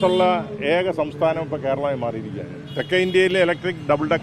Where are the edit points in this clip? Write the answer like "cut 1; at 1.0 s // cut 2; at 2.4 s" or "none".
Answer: none

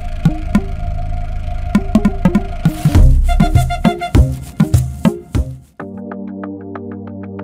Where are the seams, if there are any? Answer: cut 1; at 5.6 s

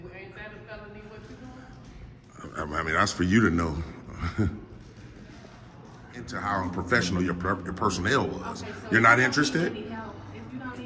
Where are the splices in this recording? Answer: cut 1; at 6.4 s

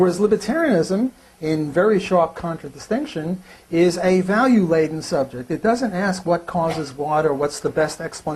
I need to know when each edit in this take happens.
cut 1; at 3.9 s

